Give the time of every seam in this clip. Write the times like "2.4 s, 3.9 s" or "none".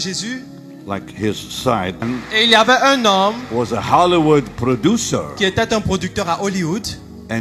2.1 s

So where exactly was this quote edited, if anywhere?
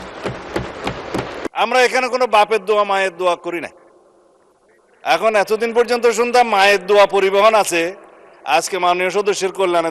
1.5 s

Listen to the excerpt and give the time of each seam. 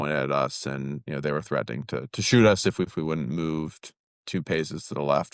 2.9 s

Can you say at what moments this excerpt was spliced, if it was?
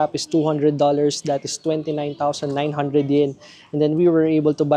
none

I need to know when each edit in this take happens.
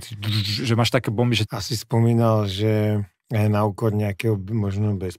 1.5 s

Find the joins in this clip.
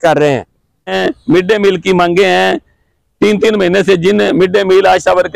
0.9 s

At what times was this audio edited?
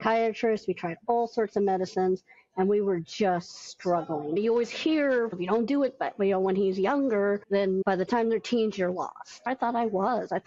4.4 s, 5.4 s, 7.8 s, 9.5 s

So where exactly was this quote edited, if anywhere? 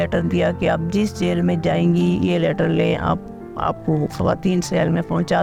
none

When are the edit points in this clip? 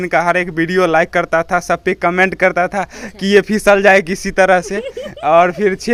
none

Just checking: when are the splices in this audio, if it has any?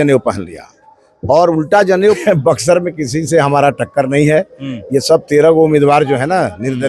2.2 s

